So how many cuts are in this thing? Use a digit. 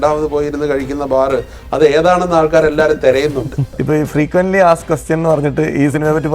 1